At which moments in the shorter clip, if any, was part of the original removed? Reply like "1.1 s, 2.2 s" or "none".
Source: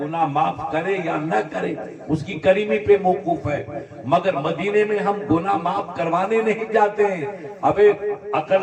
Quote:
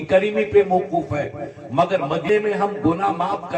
2.3 s